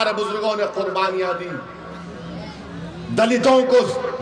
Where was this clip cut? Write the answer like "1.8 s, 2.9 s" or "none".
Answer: none